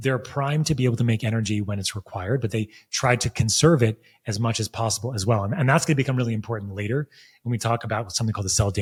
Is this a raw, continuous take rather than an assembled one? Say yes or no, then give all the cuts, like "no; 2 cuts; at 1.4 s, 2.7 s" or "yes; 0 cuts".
yes; 0 cuts